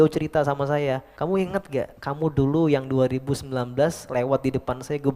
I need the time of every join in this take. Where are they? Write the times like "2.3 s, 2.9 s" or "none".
1.1 s, 2.0 s

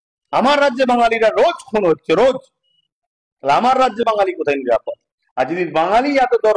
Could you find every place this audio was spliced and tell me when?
none

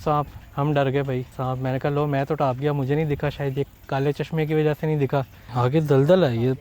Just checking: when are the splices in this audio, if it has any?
1.3 s, 5.4 s

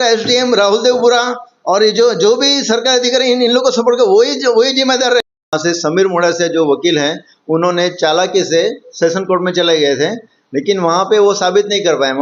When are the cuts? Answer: 5.7 s

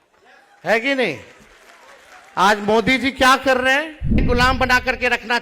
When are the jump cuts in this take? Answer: 4.2 s

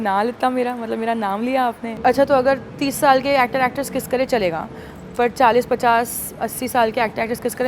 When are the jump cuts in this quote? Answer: 1.9 s

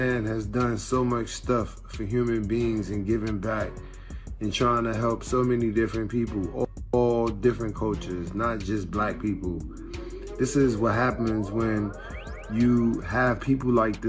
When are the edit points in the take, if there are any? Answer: none

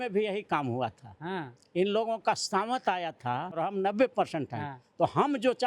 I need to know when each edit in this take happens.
3.5 s

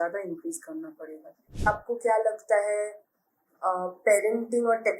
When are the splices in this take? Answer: 1.7 s

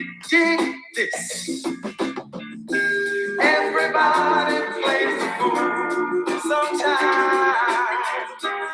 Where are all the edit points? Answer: 7.4 s

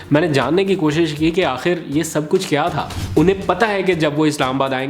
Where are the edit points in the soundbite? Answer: 2.9 s

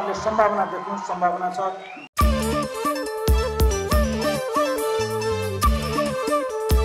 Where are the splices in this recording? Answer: none

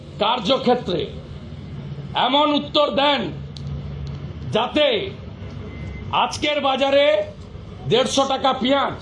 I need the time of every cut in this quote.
none

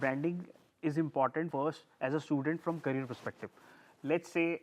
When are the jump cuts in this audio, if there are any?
none

